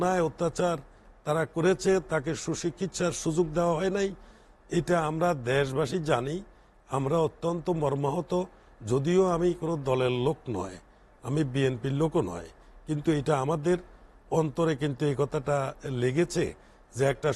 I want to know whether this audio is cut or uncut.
uncut